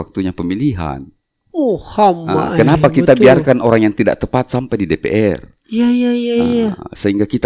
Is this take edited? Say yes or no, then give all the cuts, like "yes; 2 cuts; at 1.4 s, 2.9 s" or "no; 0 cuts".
no; 0 cuts